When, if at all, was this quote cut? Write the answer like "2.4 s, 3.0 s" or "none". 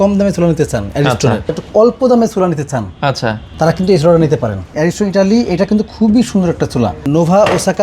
1.6 s, 3.4 s, 4.7 s, 7.0 s